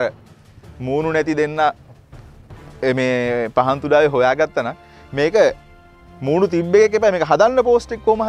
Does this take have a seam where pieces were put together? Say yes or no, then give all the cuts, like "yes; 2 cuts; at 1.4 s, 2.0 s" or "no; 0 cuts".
no; 0 cuts